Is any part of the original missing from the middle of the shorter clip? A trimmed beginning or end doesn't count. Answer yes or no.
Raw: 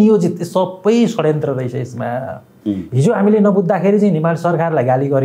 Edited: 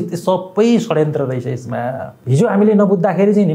yes